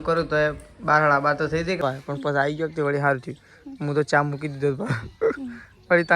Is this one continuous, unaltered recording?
no; 1 cut; at 1.8 s

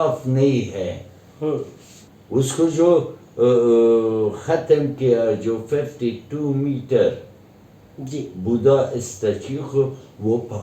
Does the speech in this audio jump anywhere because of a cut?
no; 0 cuts

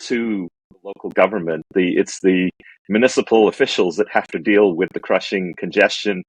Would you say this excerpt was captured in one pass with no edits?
yes; 0 cuts

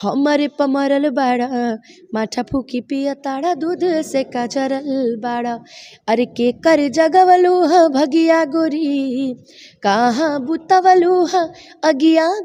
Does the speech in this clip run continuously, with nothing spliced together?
yes; 0 cuts

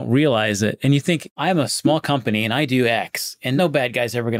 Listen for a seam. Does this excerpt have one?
yes; 2 cuts; at 1.3 s, 3.5 s

